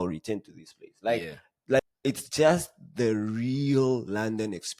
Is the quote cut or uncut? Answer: cut